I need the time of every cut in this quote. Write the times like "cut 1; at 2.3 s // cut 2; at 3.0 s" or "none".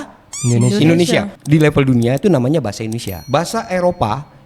cut 1; at 1.4 s